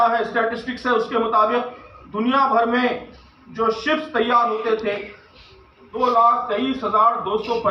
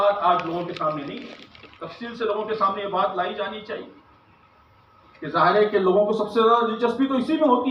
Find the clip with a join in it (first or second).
first